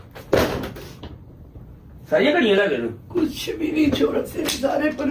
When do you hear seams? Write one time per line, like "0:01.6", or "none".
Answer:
none